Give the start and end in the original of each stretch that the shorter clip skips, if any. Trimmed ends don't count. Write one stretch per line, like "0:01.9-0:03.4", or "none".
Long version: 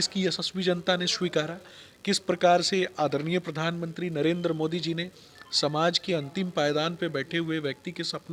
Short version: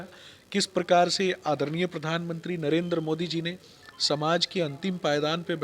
none